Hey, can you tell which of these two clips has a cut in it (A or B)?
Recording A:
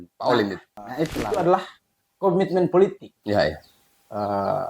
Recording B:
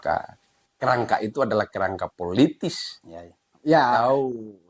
A